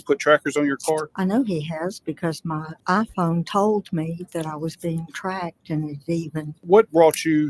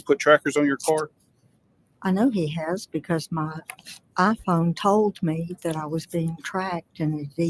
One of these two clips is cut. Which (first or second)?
first